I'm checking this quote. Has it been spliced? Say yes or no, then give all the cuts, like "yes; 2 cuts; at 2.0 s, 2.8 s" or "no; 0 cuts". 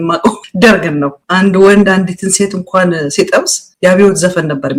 no; 0 cuts